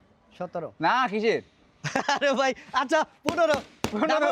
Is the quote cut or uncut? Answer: uncut